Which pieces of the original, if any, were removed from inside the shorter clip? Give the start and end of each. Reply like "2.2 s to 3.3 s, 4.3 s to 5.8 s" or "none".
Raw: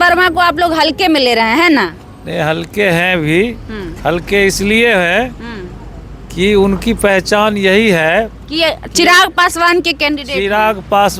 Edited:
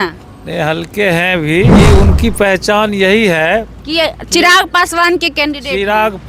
3.5 s to 6.4 s